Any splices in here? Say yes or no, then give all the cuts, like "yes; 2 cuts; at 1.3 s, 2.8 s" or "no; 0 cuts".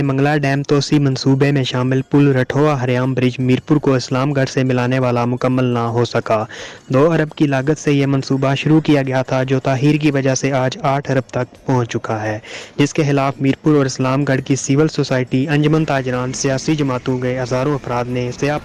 no; 0 cuts